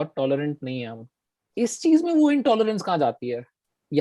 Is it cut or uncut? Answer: cut